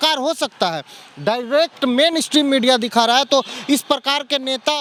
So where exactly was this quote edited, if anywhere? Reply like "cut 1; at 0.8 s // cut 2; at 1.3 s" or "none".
none